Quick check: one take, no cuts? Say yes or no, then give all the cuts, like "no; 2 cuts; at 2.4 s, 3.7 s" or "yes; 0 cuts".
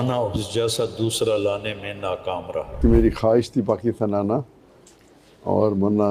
no; 1 cut; at 2.8 s